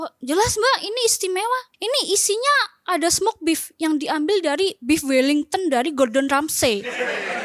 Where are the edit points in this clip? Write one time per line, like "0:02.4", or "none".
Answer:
0:01.7

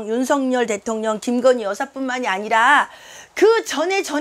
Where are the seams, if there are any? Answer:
none

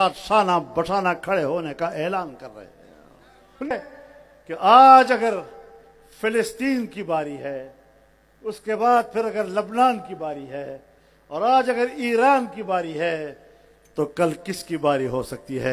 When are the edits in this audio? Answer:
0:03.7

